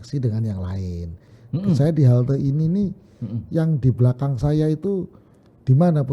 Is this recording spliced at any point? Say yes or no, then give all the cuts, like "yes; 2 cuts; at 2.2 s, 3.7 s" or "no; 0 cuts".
yes; 1 cut; at 1.3 s